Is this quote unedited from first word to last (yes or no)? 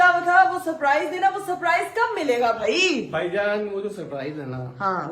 yes